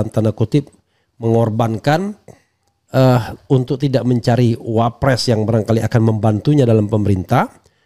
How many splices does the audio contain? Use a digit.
0